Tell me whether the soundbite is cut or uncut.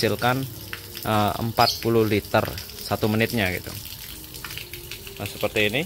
uncut